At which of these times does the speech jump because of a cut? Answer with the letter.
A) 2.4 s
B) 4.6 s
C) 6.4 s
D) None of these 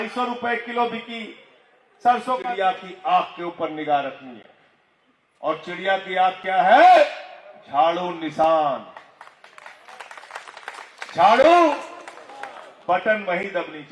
A